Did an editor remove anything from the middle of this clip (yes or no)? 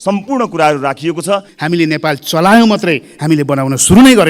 yes